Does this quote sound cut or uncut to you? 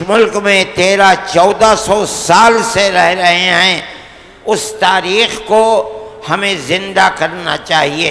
uncut